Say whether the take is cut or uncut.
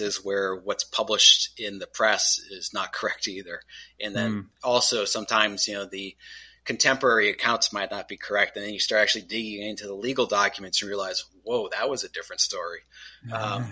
uncut